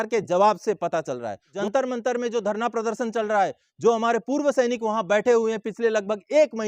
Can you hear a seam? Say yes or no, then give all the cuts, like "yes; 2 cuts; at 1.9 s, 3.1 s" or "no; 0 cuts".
yes; 1 cut; at 1.5 s